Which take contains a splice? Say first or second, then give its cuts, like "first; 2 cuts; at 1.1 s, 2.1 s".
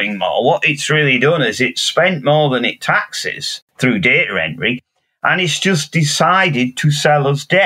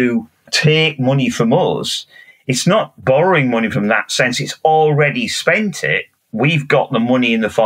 first; 1 cut; at 3.6 s